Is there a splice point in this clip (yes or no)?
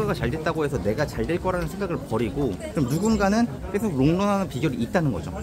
no